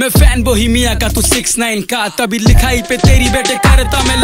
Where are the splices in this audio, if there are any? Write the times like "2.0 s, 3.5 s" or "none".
none